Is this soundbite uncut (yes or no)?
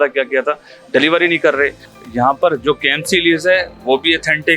no